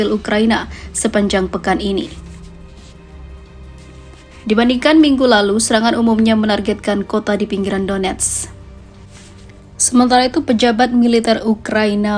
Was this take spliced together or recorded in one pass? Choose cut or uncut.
uncut